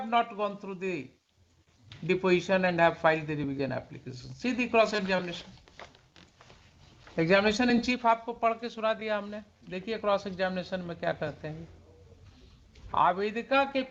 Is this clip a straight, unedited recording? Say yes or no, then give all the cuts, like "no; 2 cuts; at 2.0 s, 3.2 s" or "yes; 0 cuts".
yes; 0 cuts